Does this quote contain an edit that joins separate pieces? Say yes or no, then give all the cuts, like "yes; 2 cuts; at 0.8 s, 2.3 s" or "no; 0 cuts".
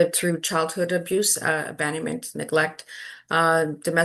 no; 0 cuts